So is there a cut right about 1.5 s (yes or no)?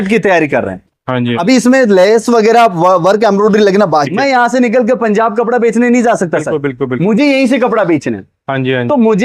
no